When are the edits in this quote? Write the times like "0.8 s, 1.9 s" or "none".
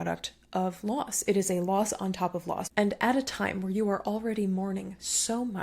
2.6 s